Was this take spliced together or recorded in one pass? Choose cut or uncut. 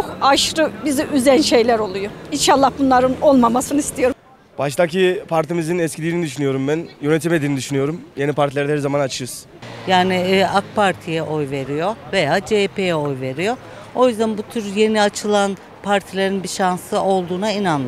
cut